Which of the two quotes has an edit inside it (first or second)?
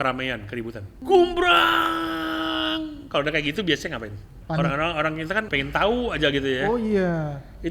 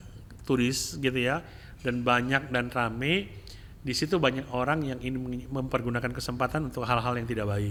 first